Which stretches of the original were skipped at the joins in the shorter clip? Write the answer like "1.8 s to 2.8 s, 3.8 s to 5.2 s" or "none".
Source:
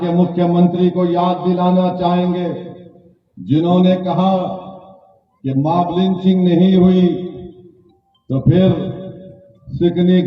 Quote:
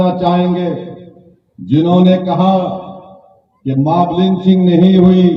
none